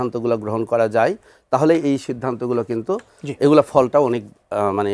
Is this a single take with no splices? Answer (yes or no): yes